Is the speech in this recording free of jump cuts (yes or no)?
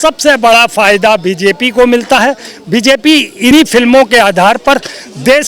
yes